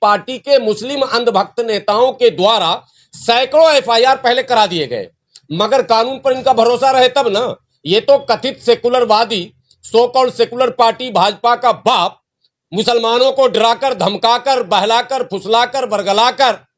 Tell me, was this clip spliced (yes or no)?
no